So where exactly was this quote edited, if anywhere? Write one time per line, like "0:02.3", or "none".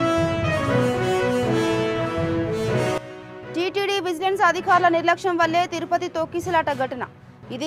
none